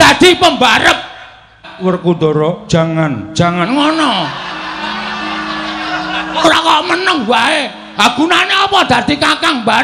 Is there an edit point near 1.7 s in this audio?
yes; 1 cut; at 1.7 s

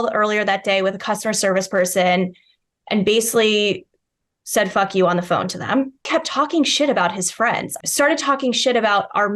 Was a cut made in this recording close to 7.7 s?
yes; 2 cuts; at 6.1 s, 7.7 s

